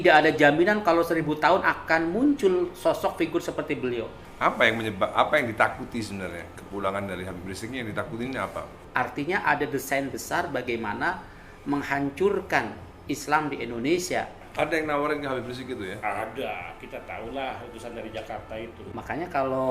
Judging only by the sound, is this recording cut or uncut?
cut